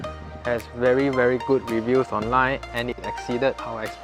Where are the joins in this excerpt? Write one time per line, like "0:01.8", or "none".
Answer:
0:03.0